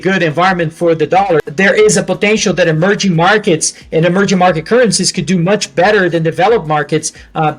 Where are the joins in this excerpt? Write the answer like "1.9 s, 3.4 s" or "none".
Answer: 1.5 s

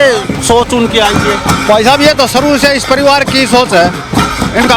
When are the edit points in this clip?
none

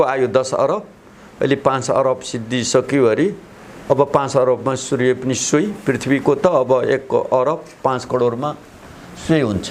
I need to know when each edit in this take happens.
none

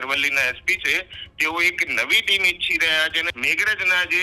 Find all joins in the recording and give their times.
3.3 s

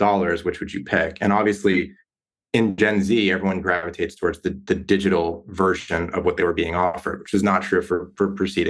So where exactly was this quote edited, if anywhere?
none

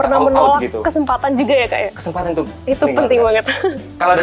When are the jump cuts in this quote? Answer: none

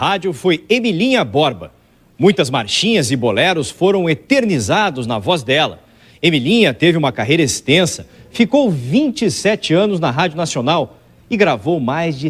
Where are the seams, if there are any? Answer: none

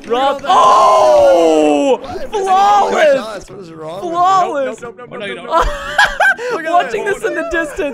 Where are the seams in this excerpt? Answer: none

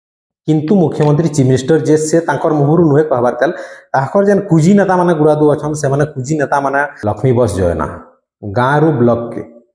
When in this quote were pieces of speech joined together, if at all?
6.9 s

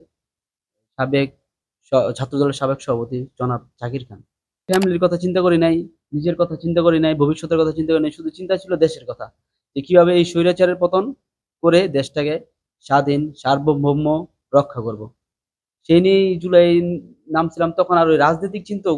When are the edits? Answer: 4.6 s

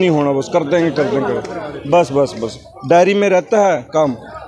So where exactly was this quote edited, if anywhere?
none

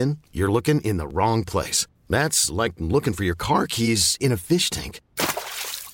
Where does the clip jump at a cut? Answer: none

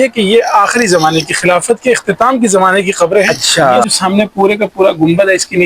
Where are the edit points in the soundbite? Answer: 3.9 s

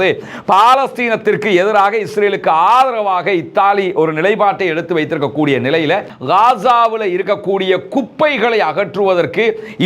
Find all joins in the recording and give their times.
6.1 s

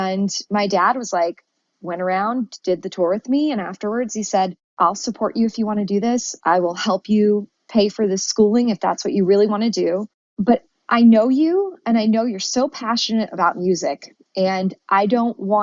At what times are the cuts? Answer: 4.6 s, 10.4 s

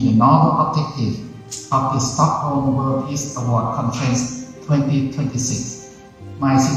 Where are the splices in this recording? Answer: none

